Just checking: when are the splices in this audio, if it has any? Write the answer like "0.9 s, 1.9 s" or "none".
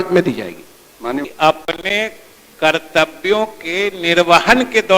1.3 s